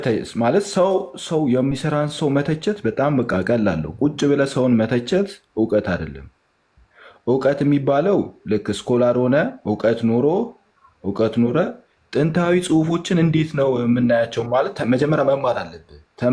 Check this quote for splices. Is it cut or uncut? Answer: uncut